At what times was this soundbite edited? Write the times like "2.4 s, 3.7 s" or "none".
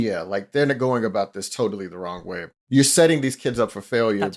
2.5 s